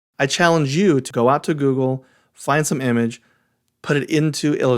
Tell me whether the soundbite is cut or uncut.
cut